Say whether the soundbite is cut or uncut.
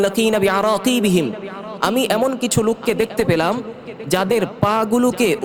uncut